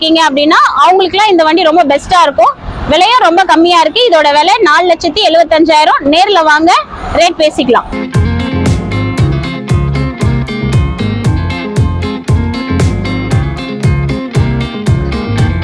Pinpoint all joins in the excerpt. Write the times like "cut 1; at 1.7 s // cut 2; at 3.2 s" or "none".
none